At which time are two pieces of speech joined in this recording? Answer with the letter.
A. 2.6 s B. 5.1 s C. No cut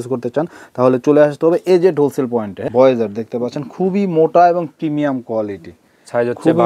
A